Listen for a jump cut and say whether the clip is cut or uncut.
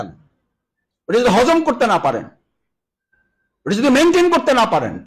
uncut